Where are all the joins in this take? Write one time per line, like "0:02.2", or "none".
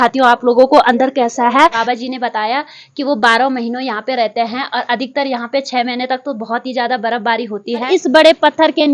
0:01.8
0:07.8